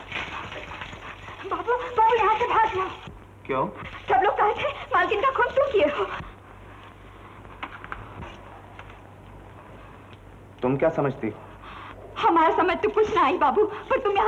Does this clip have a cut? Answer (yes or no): no